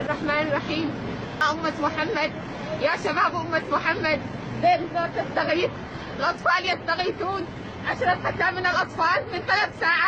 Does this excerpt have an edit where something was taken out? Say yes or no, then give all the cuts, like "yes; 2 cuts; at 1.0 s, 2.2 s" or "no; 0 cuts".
yes; 1 cut; at 1.4 s